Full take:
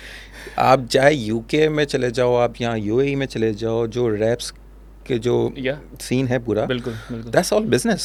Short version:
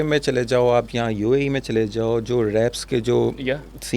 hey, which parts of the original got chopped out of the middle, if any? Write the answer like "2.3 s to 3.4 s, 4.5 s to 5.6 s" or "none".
4.5 s to 5.0 s